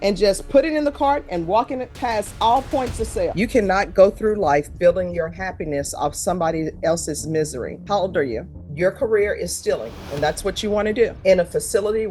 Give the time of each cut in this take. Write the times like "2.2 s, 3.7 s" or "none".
3.3 s, 8.6 s, 11.1 s